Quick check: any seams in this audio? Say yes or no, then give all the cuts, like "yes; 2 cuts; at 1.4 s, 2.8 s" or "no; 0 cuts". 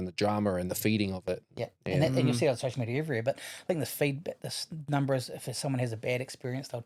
no; 0 cuts